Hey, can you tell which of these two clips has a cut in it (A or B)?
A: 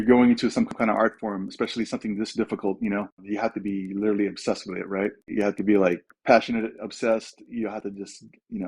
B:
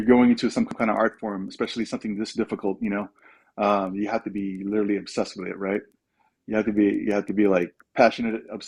A